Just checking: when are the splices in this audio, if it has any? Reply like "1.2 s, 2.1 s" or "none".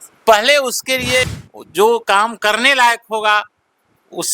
1.2 s